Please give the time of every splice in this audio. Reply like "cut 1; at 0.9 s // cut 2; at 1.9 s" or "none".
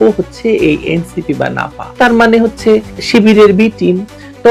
none